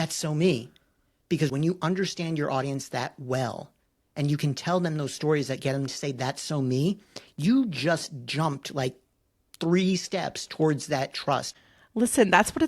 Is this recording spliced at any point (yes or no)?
yes